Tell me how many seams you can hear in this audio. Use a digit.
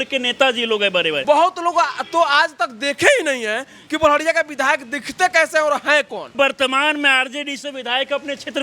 2